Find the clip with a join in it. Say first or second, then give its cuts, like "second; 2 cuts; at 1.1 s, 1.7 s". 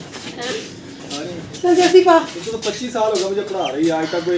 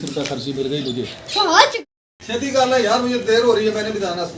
second; 1 cut; at 1.7 s